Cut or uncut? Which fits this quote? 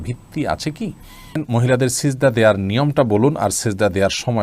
cut